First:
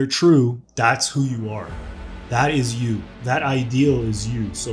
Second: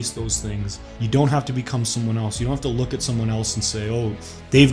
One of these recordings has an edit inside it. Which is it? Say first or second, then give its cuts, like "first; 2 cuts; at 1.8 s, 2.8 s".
second; 1 cut; at 1.0 s